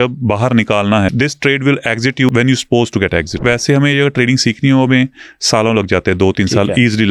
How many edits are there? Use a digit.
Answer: 3